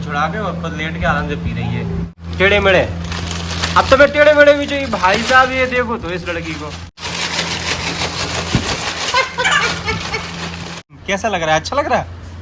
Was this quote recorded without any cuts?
no; 3 cuts; at 2.1 s, 7.0 s, 10.7 s

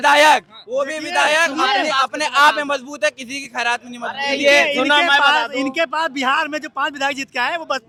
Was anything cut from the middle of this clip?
no; 0 cuts

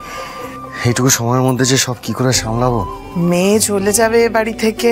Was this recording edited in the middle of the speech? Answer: yes; 1 cut; at 3.0 s

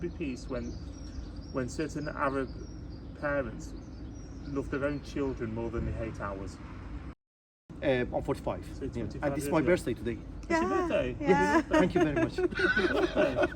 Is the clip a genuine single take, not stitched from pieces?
no; 1 cut; at 7.5 s

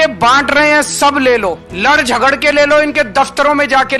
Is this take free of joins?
no; 1 cut; at 1.7 s

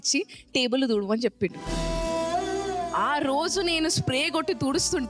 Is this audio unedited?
yes; 0 cuts

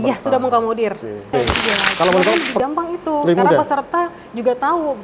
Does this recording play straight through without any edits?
no; 1 cut; at 2.5 s

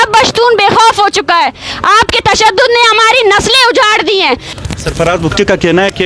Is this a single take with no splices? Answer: no; 1 cut; at 4.5 s

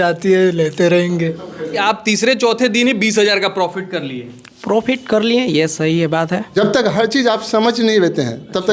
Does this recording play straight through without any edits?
no; 2 cuts; at 1.8 s, 6.5 s

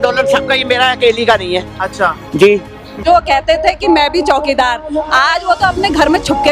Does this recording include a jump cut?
yes; 1 cut; at 3.0 s

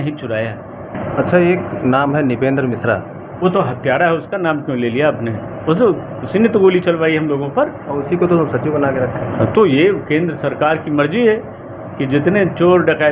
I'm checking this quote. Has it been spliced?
yes; 1 cut; at 0.9 s

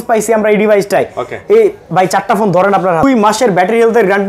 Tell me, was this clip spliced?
yes; 1 cut; at 3.0 s

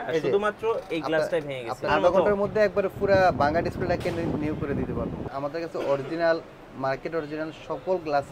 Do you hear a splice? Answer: yes; 2 cuts; at 1.9 s, 5.2 s

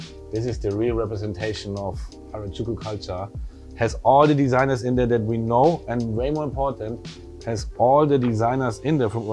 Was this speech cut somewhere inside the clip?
no; 0 cuts

